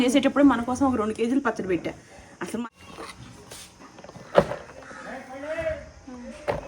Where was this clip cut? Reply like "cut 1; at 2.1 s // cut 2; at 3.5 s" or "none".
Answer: cut 1; at 2.6 s